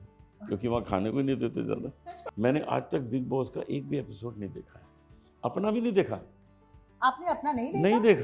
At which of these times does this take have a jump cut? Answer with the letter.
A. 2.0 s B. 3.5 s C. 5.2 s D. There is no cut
A